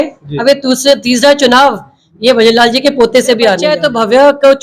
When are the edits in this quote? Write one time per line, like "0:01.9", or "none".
0:03.7